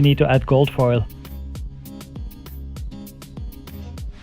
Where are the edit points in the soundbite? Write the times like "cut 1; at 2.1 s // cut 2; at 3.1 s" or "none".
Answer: cut 1; at 2.2 s